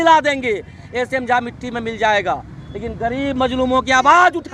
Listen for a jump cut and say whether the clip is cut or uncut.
uncut